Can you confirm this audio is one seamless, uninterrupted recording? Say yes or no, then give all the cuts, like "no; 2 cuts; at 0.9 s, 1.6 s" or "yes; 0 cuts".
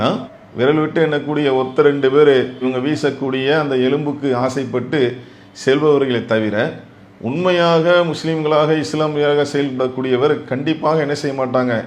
yes; 0 cuts